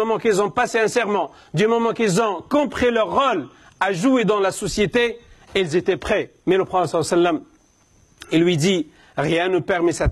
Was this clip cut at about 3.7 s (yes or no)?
no